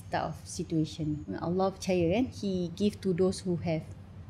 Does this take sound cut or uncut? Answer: cut